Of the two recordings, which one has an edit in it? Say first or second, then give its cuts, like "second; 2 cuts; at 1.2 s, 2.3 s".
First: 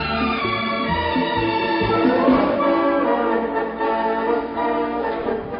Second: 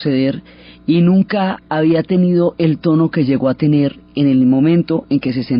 first; 1 cut; at 1.5 s